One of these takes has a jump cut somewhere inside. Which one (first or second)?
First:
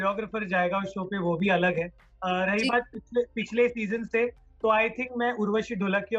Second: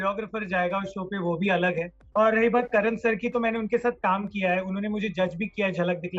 second